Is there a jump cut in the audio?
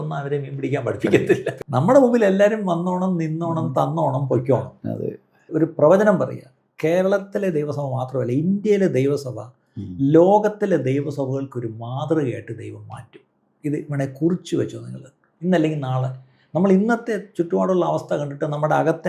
yes; 2 cuts; at 1.5 s, 5.5 s

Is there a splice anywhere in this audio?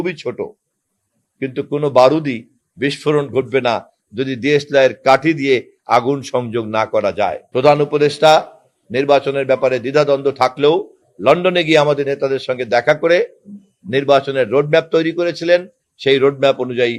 yes; 1 cut; at 7.4 s

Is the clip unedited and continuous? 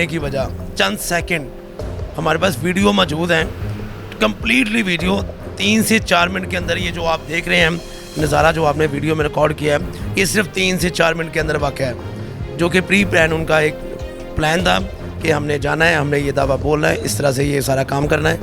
yes; 0 cuts

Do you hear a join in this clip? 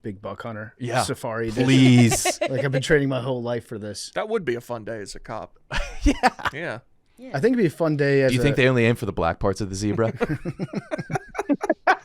yes; 1 cut; at 4.0 s

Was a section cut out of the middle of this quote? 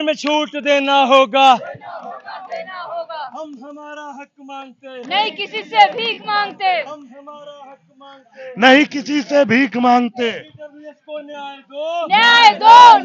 no; 0 cuts

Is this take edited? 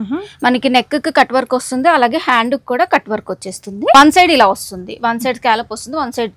yes; 1 cut; at 3.9 s

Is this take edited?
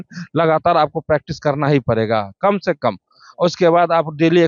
no; 0 cuts

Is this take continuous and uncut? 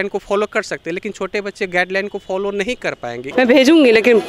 yes; 0 cuts

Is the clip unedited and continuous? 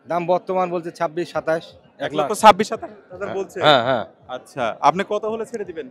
yes; 0 cuts

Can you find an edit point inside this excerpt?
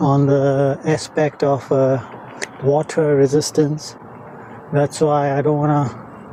no; 0 cuts

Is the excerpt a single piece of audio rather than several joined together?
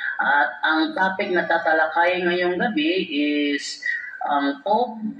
no; 1 cut; at 1.1 s

